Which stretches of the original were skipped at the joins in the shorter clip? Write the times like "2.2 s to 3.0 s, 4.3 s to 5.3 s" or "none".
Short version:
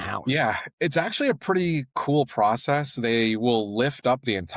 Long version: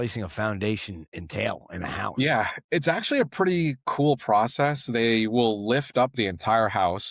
none